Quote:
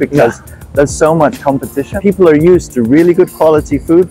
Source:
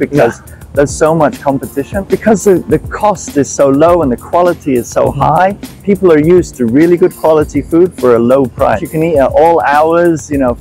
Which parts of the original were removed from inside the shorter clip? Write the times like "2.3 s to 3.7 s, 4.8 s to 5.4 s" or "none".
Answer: 1.9 s to 5.7 s